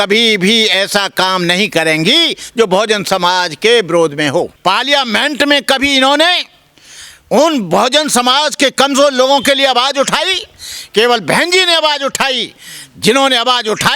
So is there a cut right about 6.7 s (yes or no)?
no